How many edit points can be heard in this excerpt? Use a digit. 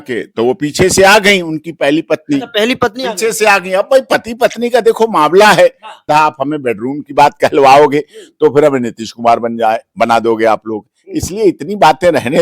1